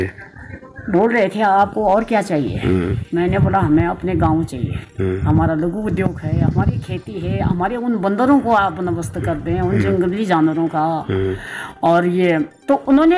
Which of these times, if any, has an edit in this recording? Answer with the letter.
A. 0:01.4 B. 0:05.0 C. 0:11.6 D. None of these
D